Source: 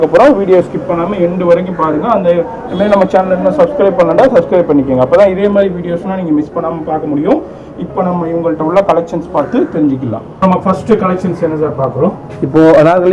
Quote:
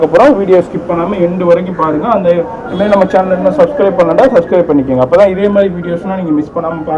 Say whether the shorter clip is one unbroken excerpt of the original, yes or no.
yes